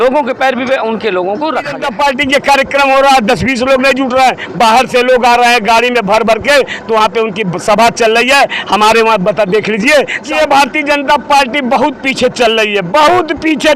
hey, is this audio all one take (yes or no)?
no